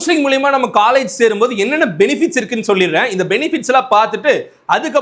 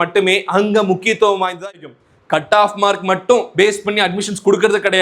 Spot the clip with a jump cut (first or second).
second